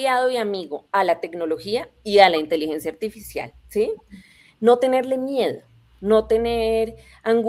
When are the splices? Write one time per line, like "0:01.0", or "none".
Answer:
none

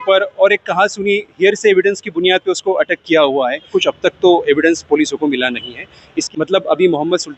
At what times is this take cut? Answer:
0:03.7
0:06.2

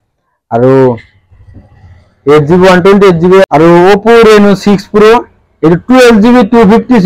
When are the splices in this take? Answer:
0:03.5

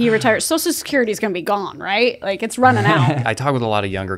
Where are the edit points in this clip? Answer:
0:03.3

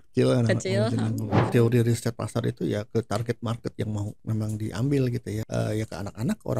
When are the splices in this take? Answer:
0:01.3
0:04.1
0:05.4

